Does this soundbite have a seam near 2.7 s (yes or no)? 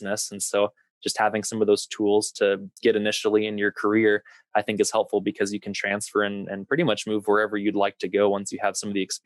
yes